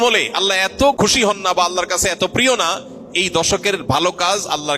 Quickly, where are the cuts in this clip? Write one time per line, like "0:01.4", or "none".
0:01.0